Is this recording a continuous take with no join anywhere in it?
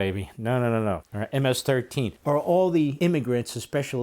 no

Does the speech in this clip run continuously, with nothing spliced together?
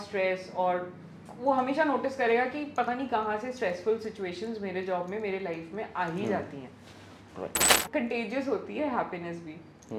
no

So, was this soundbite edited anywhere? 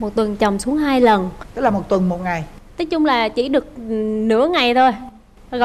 yes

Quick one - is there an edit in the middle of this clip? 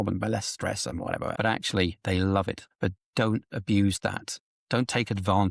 yes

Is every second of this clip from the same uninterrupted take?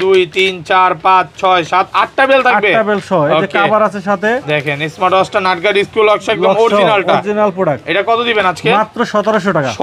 yes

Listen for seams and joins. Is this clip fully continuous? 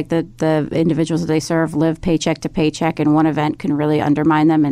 yes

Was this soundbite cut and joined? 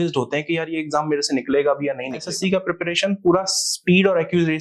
yes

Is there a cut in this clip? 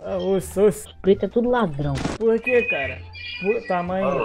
yes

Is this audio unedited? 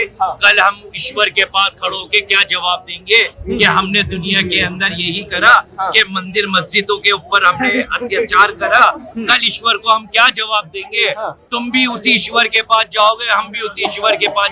yes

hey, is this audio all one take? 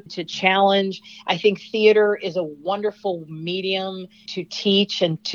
no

